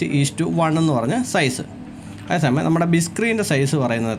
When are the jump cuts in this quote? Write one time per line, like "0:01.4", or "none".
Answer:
none